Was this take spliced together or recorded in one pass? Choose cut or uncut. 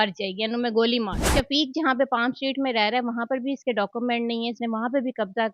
cut